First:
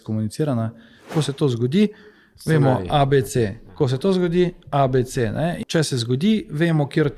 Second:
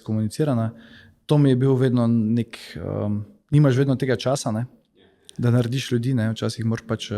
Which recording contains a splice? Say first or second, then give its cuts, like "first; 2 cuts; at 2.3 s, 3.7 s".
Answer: first; 2 cuts; at 1.1 s, 5.6 s